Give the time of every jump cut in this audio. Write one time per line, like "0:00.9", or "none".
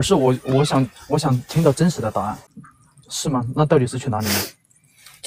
0:02.4